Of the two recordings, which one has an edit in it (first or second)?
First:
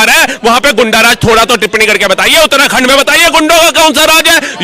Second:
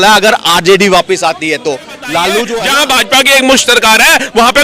second